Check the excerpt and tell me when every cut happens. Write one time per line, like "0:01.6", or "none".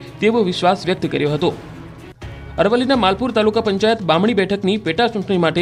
none